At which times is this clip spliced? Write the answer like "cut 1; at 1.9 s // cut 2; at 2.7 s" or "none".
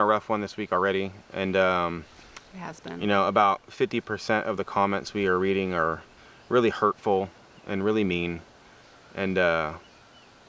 none